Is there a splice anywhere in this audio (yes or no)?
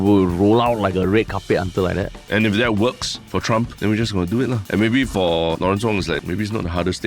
yes